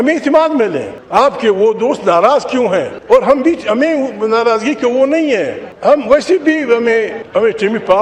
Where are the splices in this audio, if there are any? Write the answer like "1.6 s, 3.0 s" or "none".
0.9 s, 2.9 s, 5.6 s, 7.2 s

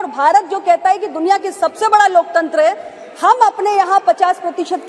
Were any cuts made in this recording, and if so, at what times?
none

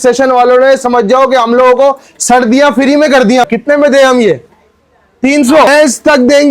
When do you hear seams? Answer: 3.5 s, 5.7 s

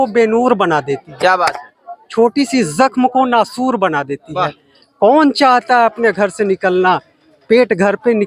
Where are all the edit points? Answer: none

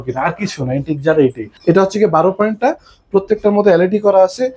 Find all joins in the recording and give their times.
1.5 s

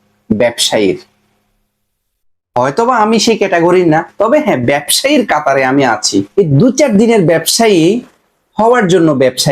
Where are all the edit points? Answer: 6.3 s

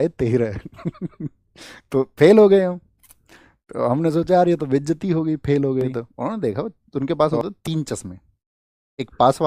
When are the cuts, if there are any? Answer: 6.1 s

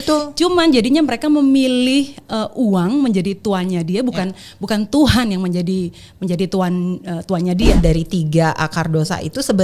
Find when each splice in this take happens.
7.7 s

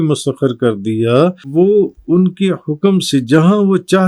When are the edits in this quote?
1.4 s

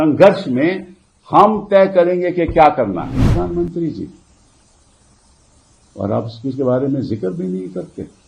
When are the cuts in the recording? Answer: 3.2 s

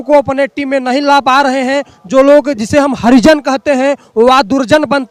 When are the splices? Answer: none

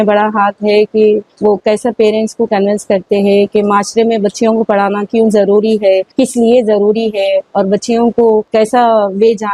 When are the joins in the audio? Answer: 1.3 s, 6.1 s, 8.5 s

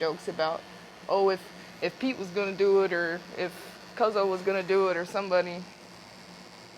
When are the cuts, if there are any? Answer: none

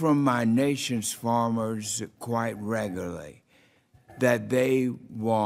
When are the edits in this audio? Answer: 3.1 s

